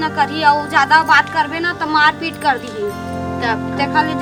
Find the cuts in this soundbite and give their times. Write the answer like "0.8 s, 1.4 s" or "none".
none